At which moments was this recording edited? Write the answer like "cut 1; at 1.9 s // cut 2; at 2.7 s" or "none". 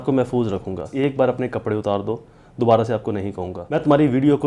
cut 1; at 0.9 s // cut 2; at 3.6 s